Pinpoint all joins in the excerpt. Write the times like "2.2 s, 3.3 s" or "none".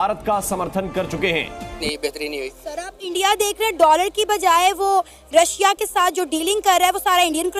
1.8 s